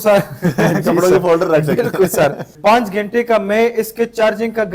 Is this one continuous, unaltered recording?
no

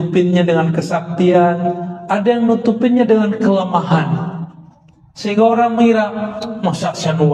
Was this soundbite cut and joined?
no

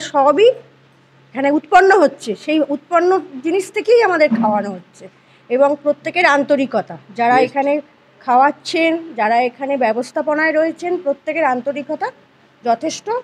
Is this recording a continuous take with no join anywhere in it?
yes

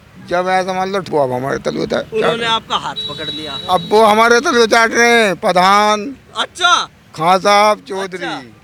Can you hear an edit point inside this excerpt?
no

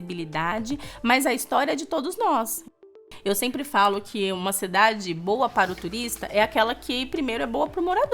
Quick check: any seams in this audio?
yes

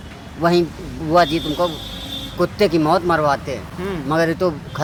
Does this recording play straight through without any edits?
yes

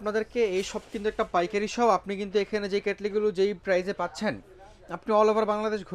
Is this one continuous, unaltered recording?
yes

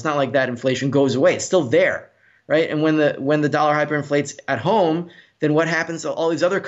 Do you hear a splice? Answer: no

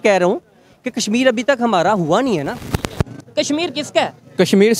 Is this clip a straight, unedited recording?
no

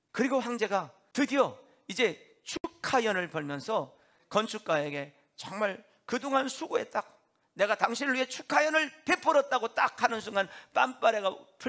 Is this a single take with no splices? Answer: no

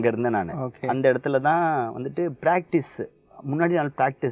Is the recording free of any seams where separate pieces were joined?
yes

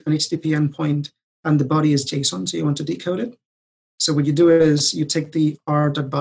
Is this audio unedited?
yes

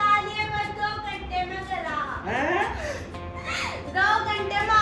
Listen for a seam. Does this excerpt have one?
no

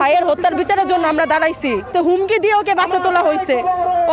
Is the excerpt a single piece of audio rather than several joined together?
no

